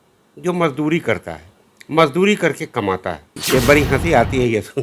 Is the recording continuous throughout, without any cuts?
no; 1 cut; at 3.3 s

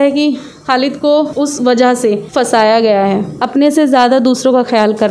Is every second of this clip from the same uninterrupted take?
no; 3 cuts; at 1.3 s, 2.2 s, 3.3 s

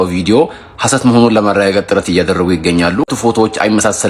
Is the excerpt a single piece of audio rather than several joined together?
no; 1 cut; at 3.1 s

